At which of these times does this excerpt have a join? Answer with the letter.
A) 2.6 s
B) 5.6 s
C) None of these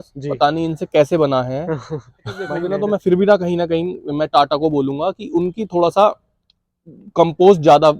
A